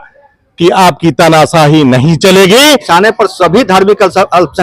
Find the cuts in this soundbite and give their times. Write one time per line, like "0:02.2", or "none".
0:02.9

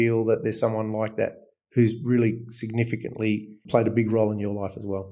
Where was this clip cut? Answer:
0:03.6

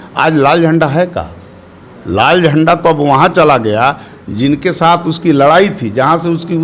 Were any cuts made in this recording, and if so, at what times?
none

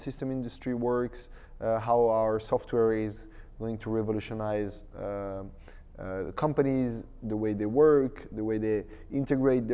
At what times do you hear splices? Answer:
none

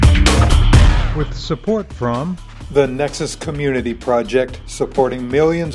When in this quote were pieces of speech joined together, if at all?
0:01.0

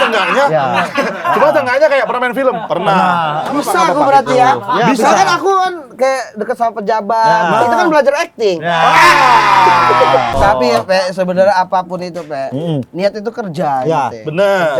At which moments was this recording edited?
0:03.6
0:10.3

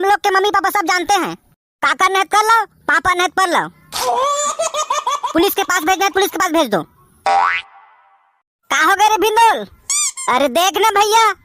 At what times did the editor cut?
none

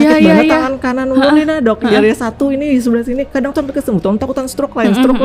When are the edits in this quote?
none

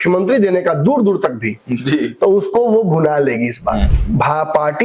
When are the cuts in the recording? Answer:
0:03.9

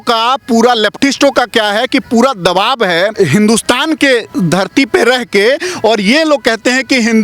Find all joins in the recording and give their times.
0:03.1

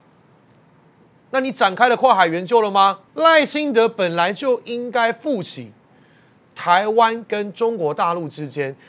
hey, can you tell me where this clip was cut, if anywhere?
0:03.0

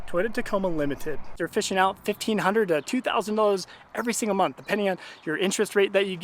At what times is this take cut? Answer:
0:01.4

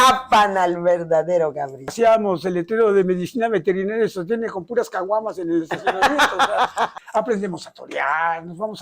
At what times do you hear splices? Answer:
0:01.9
0:06.9

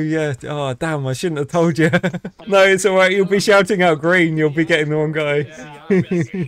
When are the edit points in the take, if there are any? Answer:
0:02.4

